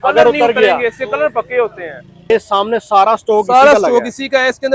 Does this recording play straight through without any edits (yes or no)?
no